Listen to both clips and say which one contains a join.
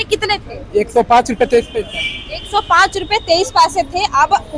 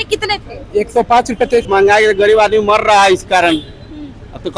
second; 1 cut; at 1.7 s

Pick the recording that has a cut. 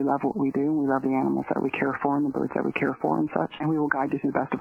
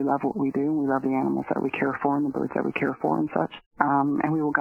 first; 1 cut; at 3.6 s

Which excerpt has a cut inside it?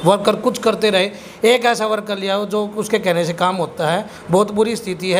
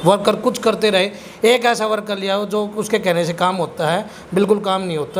first; 1 cut; at 4.1 s

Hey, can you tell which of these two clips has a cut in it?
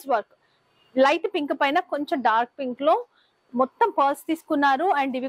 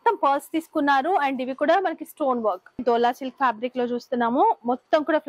second; 1 cut; at 2.8 s

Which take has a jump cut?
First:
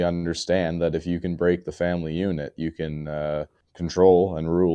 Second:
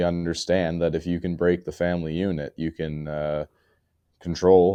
first; 1 cut; at 3.6 s

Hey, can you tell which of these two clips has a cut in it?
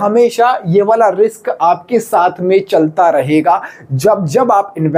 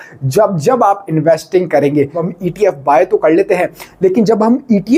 second; 1 cut; at 2.3 s

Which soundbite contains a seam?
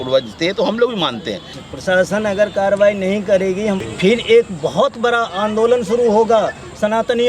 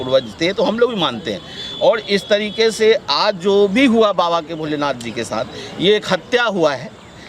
first; 2 cuts; at 1.6 s, 3.9 s

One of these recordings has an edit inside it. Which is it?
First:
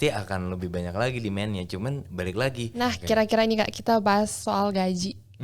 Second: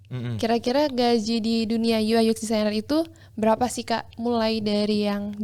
first; 1 cut; at 2.7 s

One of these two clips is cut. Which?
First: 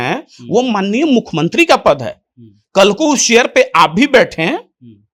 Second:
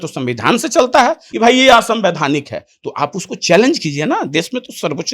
second; 1 cut; at 1.2 s

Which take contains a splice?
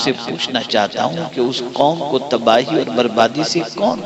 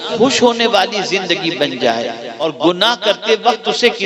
second; 1 cut; at 2.4 s

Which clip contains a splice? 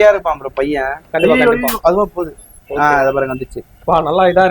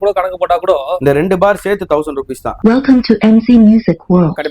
second; 2 cuts; at 1.0 s, 2.4 s

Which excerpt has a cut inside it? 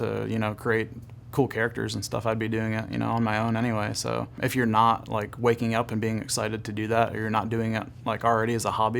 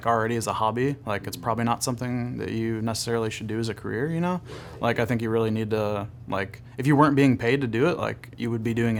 first; 1 cut; at 4.3 s

